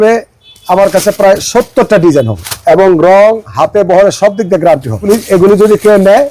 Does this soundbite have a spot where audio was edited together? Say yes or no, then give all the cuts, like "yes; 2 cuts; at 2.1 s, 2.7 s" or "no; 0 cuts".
yes; 2 cuts; at 2.4 s, 5.0 s